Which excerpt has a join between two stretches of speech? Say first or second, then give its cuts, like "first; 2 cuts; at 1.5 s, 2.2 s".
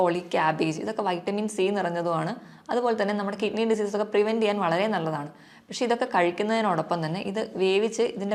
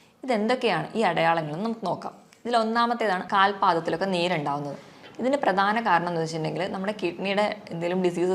second; 1 cut; at 3.2 s